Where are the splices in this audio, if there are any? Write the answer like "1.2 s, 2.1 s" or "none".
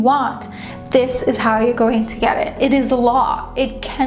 2.5 s